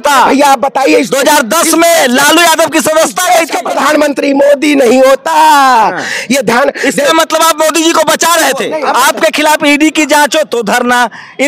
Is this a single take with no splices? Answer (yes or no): no